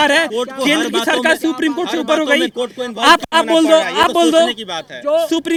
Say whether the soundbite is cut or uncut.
uncut